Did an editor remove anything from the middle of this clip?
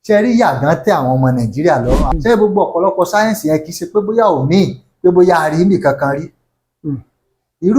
yes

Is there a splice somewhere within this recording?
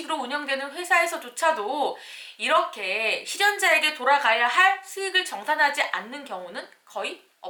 no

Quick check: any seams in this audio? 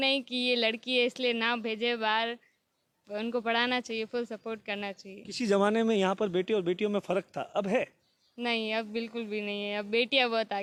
no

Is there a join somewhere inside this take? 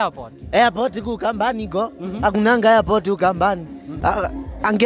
yes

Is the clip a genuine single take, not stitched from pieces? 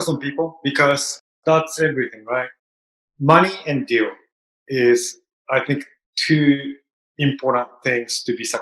no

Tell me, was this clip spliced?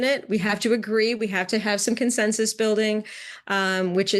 no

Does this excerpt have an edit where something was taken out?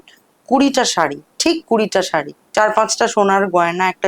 yes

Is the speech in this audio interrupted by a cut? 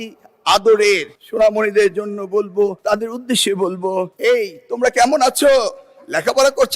yes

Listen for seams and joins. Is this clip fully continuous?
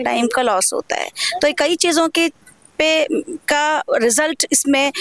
yes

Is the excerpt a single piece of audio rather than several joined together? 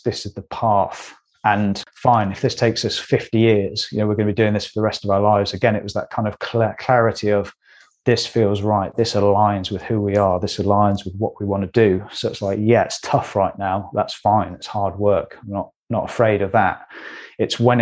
no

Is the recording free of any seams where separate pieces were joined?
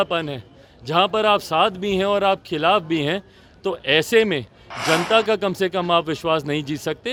yes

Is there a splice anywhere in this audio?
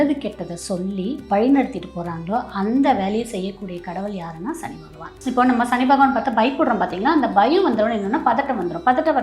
yes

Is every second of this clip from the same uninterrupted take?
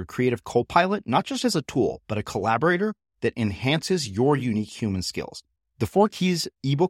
yes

